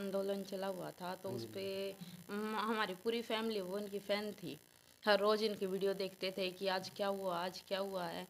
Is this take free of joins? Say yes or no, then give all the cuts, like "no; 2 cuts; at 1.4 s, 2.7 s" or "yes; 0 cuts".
yes; 0 cuts